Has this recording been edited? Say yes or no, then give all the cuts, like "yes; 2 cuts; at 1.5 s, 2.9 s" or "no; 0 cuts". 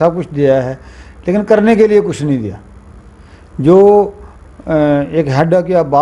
no; 0 cuts